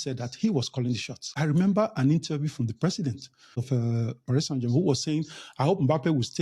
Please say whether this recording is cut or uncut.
cut